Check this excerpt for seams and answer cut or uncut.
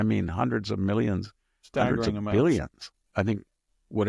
cut